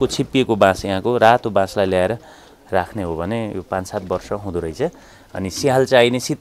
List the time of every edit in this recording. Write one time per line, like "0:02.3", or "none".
0:05.0